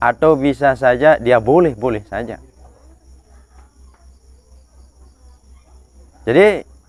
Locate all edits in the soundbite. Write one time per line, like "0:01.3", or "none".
none